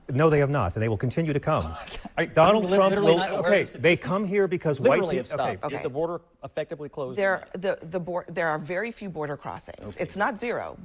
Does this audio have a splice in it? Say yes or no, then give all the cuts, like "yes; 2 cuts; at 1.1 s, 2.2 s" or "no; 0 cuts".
yes; 1 cut; at 5.6 s